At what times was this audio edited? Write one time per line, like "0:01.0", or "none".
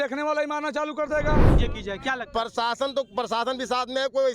0:01.5